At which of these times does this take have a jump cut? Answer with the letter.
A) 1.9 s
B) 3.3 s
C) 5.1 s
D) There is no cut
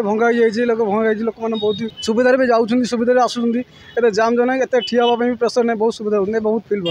A